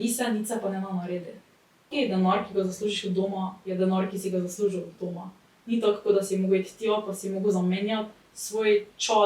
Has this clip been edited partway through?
yes; 1 cut; at 1.9 s

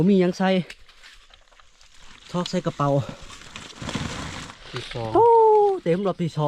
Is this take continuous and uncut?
no; 1 cut; at 4.6 s

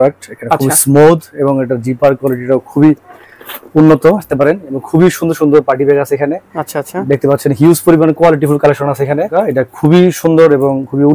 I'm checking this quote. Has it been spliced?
yes; 2 cuts; at 4.3 s, 9.3 s

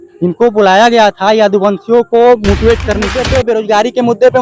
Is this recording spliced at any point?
yes; 1 cut; at 3.2 s

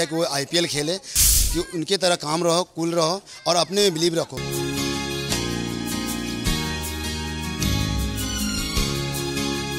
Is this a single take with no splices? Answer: no; 2 cuts; at 1.3 s, 4.4 s

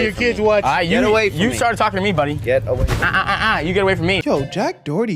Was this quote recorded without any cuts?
no; 1 cut; at 4.2 s

